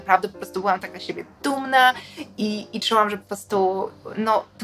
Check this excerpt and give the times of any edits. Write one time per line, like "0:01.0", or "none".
none